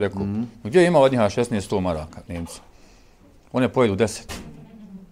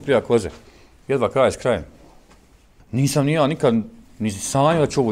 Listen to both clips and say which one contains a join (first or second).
second